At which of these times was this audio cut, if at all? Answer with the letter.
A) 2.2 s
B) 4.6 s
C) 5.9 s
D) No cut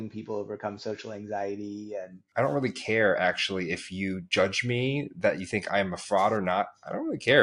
A